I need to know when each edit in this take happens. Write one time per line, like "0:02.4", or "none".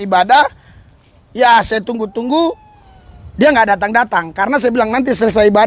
none